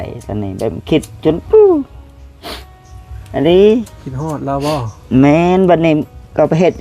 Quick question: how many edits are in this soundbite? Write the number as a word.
zero